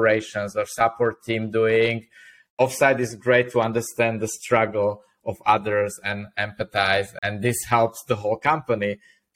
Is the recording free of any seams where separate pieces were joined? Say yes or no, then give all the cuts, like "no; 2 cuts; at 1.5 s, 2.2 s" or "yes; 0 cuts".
no; 2 cuts; at 2.4 s, 7.1 s